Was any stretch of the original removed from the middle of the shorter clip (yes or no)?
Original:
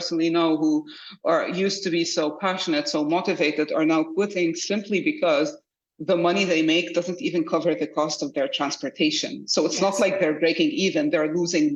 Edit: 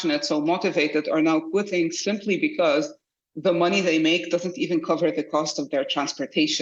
no